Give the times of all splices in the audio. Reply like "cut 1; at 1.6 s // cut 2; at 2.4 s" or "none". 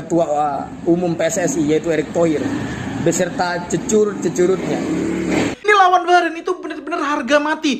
cut 1; at 5.5 s